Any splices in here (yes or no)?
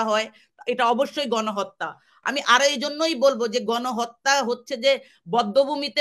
no